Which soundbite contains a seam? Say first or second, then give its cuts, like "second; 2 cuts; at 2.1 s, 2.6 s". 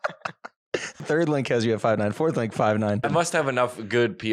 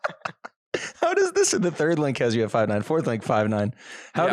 first; 2 cuts; at 1.0 s, 3.1 s